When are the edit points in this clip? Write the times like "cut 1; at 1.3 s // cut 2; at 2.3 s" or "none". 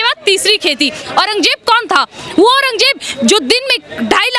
cut 1; at 1.0 s